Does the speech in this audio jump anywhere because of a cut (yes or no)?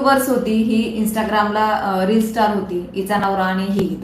no